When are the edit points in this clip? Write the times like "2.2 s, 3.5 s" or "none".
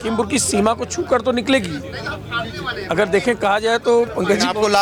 none